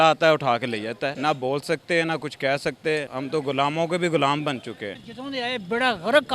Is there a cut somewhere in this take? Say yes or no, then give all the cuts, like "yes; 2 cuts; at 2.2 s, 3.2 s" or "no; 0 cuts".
yes; 3 cuts; at 1.1 s, 3.1 s, 4.9 s